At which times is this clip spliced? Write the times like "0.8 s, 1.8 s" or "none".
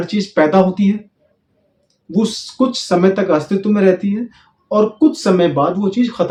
none